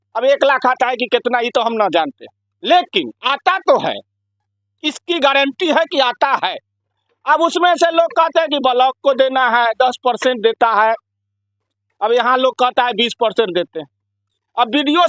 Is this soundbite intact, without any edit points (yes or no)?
yes